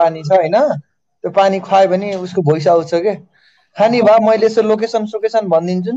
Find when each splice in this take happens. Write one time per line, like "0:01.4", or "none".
none